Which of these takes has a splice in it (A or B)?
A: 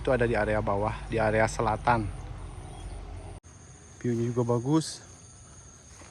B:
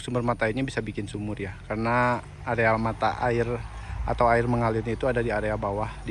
A